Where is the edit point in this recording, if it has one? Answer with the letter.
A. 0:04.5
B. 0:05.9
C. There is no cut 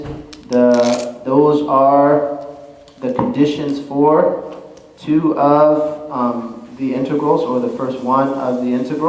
C